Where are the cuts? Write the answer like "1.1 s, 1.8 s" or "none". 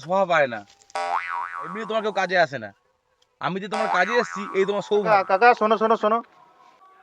5.1 s